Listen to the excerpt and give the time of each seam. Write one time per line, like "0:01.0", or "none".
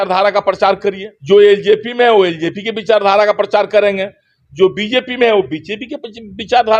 0:01.1